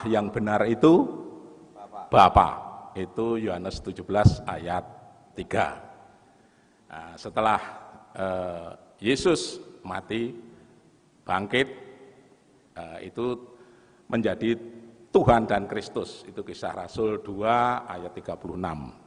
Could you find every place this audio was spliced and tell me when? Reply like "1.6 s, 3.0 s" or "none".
none